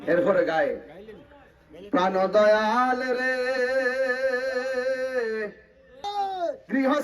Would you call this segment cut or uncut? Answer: cut